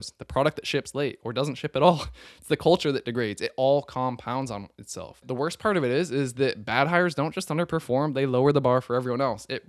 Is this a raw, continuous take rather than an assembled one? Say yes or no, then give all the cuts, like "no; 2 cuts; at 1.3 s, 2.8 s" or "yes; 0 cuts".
no; 1 cut; at 5.2 s